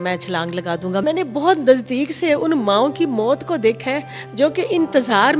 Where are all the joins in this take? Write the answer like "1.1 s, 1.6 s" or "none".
1.0 s

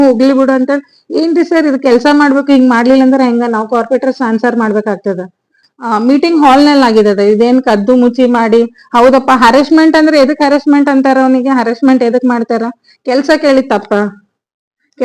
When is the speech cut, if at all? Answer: 5.6 s

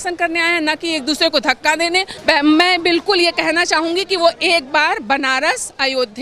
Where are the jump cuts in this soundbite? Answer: 2.1 s

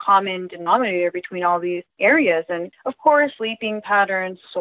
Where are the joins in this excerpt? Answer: 1.9 s, 2.8 s, 3.4 s

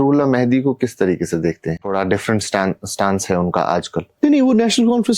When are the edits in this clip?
1.9 s, 4.1 s

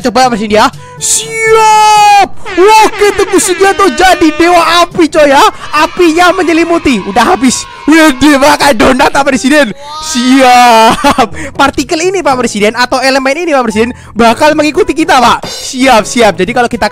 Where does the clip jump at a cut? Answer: none

